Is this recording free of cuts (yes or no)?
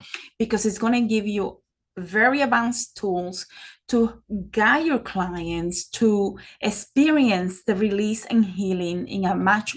yes